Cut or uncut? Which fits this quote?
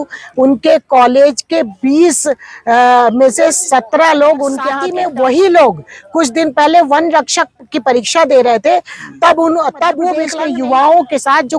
cut